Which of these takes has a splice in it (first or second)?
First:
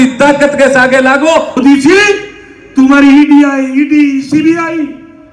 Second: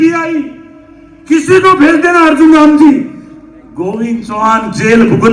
first